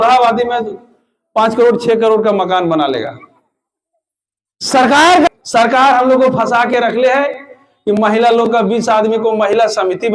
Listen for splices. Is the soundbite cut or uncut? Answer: cut